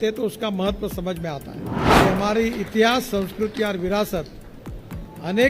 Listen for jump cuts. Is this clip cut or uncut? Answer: cut